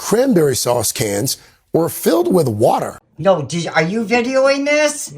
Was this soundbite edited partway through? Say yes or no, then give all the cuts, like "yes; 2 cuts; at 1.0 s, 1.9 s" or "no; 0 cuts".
yes; 1 cut; at 3.0 s